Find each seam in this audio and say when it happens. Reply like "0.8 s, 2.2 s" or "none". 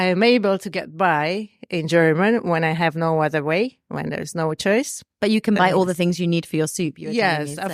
none